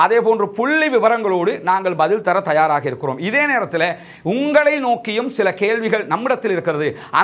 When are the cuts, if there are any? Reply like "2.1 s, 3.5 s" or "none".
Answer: none

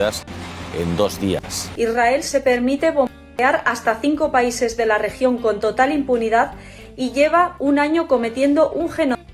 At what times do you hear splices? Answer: 1.7 s

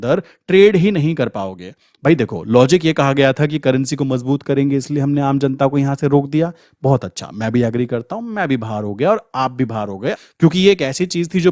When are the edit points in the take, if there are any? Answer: 10.2 s

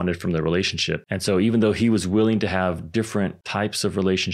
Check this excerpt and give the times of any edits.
1.1 s, 3.4 s

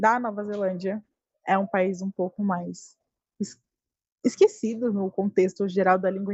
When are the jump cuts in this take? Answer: none

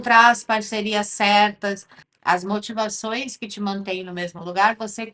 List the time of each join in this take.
2.0 s

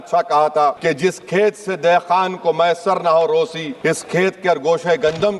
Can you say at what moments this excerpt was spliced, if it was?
0.8 s, 3.6 s

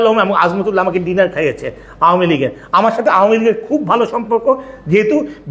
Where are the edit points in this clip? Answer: none

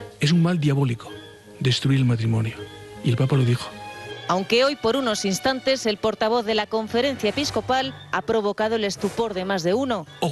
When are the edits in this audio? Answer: none

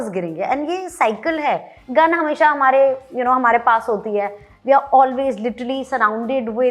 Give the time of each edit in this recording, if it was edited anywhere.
1.8 s

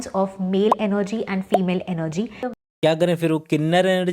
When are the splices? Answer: 2.5 s

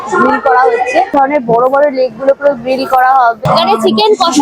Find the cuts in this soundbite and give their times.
1.1 s, 3.4 s

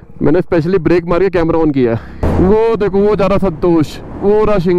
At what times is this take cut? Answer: 2.2 s

